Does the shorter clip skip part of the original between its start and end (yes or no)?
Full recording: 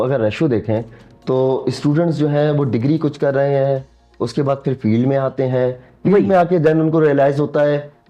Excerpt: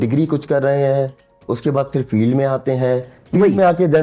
no